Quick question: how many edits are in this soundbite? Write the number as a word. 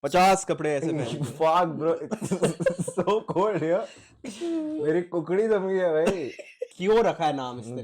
one